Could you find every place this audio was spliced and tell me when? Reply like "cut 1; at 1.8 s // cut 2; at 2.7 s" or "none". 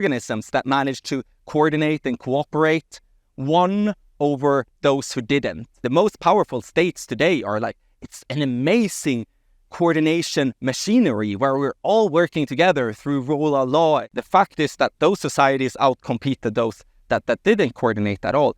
cut 1; at 5.8 s // cut 2; at 14.1 s